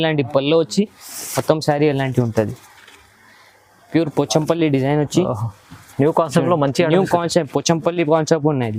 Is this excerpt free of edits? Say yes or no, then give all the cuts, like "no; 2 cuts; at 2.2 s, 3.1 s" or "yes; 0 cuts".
yes; 0 cuts